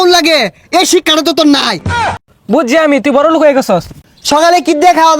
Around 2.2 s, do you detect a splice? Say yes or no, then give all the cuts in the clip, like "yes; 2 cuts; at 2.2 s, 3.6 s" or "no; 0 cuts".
yes; 2 cuts; at 2.2 s, 3.9 s